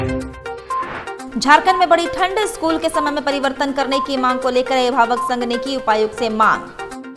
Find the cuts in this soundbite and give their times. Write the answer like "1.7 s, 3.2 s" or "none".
none